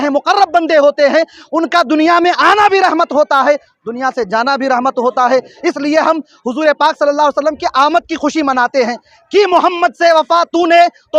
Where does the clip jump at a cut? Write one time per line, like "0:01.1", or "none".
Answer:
0:09.1